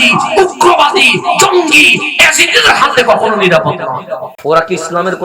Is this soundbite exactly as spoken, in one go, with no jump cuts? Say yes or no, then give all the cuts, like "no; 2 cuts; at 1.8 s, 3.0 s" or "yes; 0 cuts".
no; 1 cut; at 4.3 s